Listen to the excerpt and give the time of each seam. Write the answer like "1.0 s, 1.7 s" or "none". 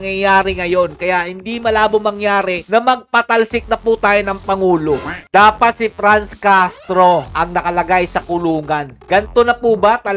5.1 s, 7.3 s, 9.0 s

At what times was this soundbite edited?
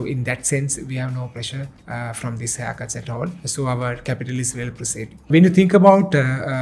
1.8 s, 3.4 s, 5.3 s

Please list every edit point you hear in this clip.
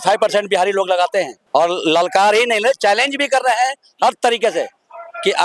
1.4 s

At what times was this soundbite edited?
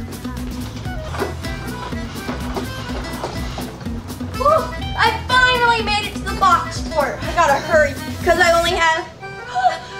1.1 s

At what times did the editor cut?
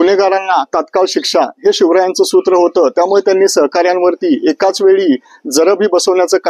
none

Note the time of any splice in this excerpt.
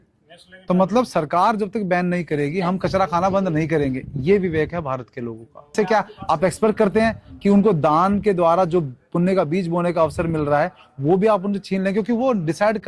5.7 s

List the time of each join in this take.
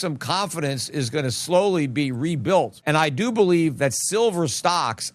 none

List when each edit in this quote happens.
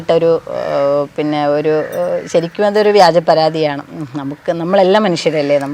none

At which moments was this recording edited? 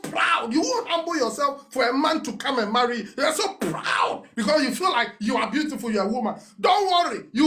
none

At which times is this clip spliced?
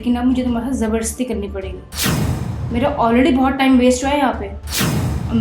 1.8 s, 2.6 s

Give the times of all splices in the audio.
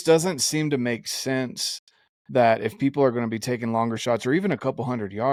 none

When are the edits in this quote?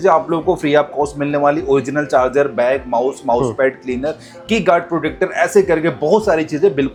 none

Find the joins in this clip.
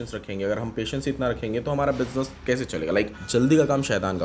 3.2 s

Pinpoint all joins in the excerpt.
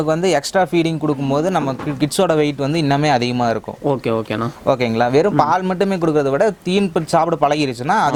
none

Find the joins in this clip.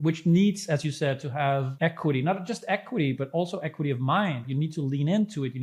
1.7 s, 4.4 s

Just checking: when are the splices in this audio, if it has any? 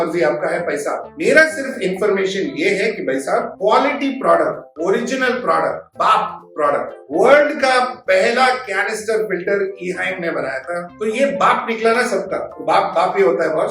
5.9 s, 7.0 s, 10.9 s

